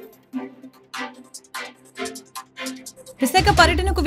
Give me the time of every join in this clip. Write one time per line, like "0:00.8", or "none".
0:02.9